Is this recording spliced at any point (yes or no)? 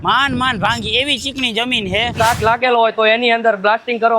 yes